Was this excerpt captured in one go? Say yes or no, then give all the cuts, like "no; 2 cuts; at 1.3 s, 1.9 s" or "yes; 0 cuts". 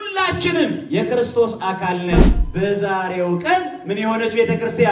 no; 1 cut; at 2.4 s